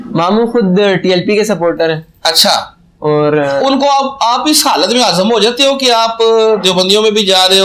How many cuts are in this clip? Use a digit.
0